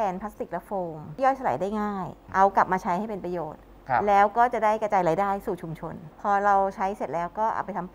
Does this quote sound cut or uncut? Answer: cut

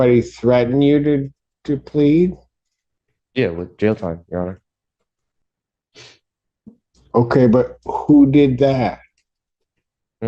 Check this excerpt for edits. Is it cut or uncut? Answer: uncut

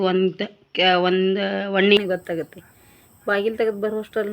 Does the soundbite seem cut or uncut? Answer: cut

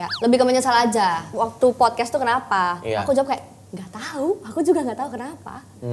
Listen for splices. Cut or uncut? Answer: cut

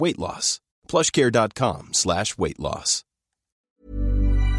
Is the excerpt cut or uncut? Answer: cut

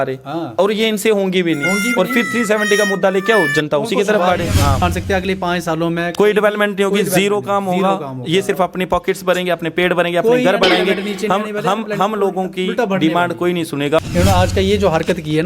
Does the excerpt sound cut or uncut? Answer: cut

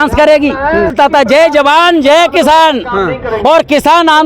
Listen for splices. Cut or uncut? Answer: cut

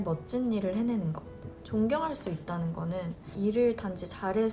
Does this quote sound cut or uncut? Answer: cut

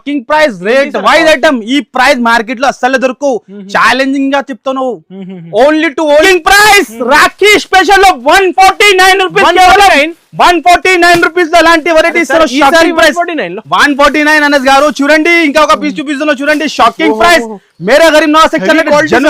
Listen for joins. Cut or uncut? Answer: cut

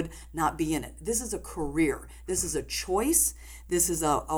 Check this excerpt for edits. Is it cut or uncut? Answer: uncut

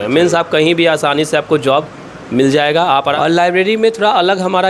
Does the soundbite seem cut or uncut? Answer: cut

